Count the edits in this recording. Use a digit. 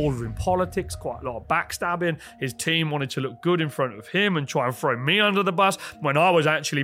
0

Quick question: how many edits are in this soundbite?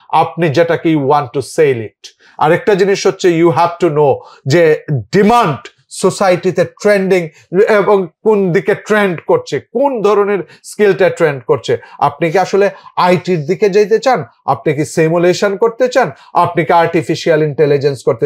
0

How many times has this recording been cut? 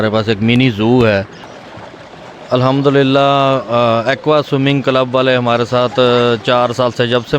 1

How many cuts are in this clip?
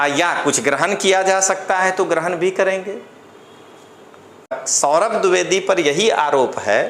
1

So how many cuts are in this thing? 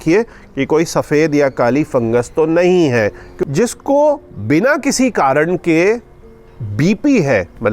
1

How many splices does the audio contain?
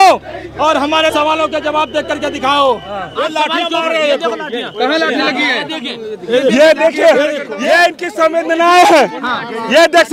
3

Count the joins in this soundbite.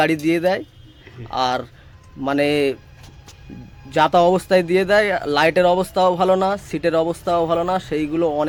0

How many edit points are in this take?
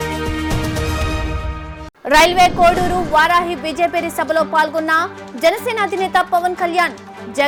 0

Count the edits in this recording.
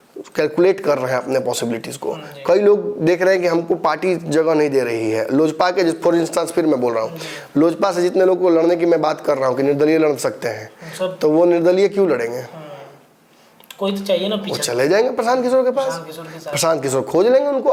0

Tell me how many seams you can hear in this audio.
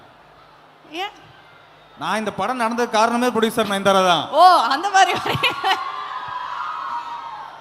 0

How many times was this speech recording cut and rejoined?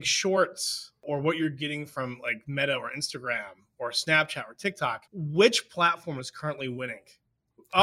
2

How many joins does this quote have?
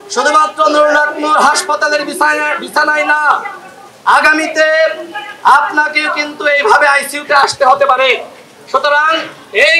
0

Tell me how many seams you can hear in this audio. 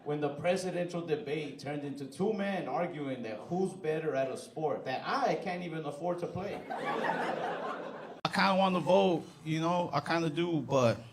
1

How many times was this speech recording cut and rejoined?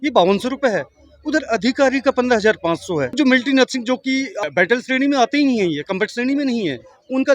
2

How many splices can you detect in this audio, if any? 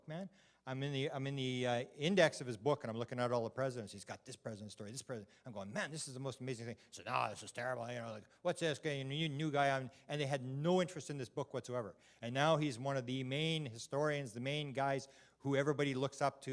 1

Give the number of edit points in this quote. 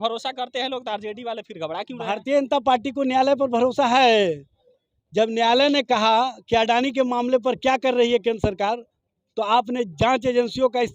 0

